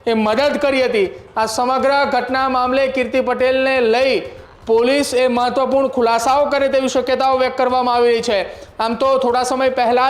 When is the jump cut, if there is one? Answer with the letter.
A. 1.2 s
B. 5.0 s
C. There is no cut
C